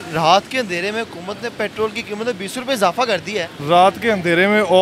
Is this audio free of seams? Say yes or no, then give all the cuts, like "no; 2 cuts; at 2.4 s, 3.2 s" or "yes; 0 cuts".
yes; 0 cuts